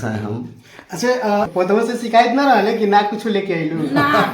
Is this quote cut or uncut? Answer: cut